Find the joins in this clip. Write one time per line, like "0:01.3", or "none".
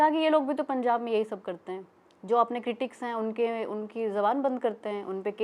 none